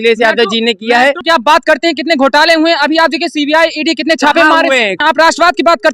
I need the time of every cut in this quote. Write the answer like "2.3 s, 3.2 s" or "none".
1.2 s, 4.9 s